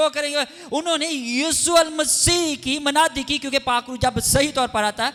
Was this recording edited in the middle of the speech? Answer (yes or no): no